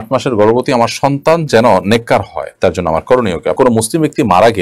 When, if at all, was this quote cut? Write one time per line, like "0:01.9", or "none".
0:03.6